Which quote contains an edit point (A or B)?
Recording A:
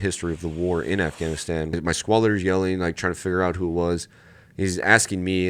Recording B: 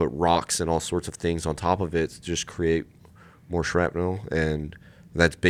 A